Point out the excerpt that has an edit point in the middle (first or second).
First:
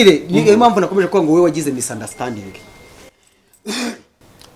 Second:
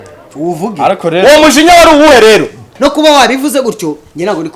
second